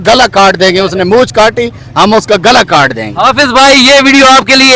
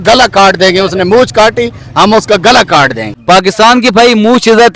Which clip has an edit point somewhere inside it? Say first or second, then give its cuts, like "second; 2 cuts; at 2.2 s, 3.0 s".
second; 1 cut; at 3.1 s